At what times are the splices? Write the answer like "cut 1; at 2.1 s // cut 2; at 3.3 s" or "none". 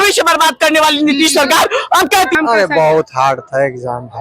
cut 1; at 2.3 s